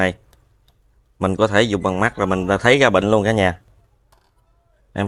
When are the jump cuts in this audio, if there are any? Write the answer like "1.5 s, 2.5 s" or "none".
none